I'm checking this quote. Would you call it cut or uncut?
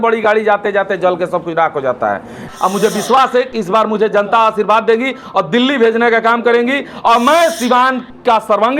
cut